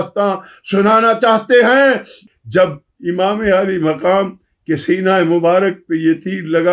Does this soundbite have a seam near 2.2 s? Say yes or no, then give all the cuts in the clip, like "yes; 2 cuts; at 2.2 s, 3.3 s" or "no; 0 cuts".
yes; 1 cut; at 2.2 s